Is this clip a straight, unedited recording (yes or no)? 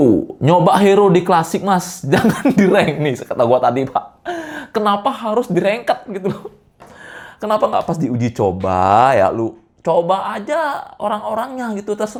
yes